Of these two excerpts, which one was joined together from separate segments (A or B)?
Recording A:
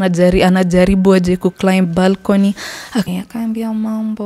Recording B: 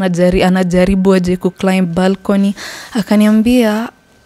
A